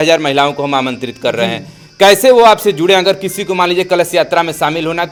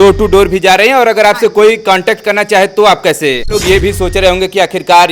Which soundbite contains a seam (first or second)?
second